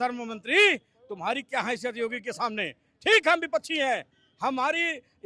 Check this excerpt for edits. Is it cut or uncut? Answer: uncut